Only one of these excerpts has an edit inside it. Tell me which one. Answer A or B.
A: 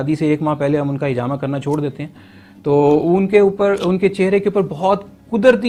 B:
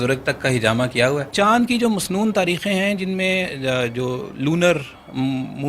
B